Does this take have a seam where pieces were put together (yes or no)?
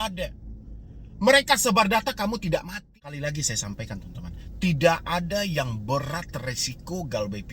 yes